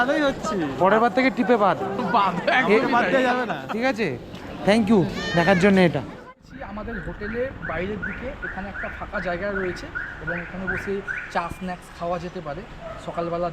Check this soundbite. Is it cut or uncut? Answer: cut